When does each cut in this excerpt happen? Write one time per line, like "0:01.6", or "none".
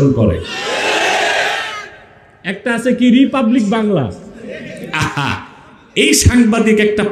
none